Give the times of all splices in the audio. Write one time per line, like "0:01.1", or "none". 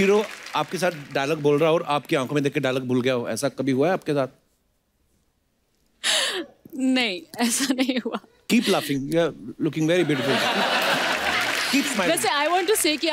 none

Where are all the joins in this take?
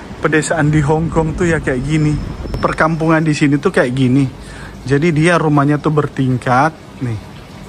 0:02.6

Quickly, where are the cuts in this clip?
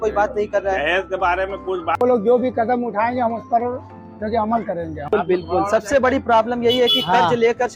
0:02.0
0:05.1

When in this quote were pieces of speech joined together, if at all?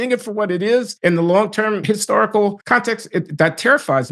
0:00.9
0:01.8
0:02.6

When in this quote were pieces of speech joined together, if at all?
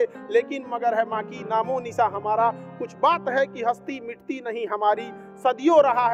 none

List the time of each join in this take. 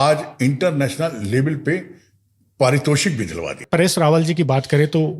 0:03.6

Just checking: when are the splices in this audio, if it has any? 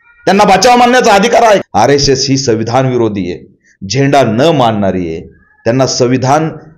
0:01.7

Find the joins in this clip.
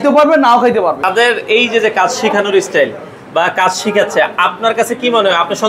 0:01.0

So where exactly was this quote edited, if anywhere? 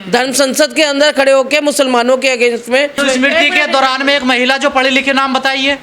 0:03.0

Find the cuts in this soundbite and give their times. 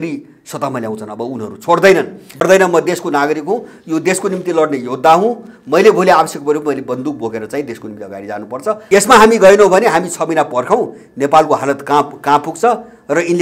0:02.4
0:08.8

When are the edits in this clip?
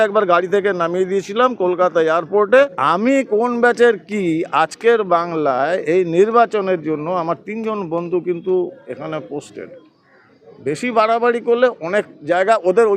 0:02.8

